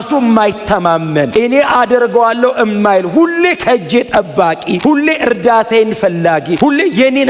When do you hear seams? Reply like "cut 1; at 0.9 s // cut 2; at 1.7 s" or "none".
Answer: cut 1; at 1.3 s // cut 2; at 4.8 s // cut 3; at 6.5 s